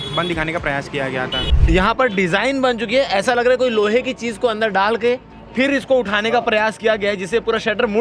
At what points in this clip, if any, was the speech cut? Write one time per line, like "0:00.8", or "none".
0:01.4

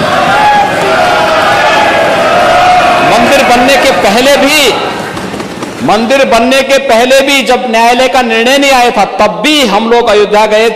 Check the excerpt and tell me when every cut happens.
none

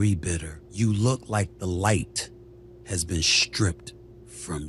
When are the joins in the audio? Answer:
none

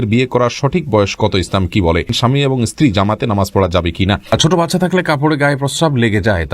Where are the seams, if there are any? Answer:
0:02.1
0:04.2

